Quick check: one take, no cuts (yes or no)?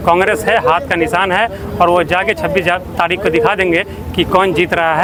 yes